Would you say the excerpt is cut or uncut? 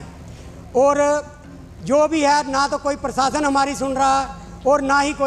uncut